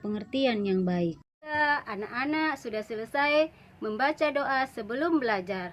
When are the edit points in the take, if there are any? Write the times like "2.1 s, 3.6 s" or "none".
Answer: 1.5 s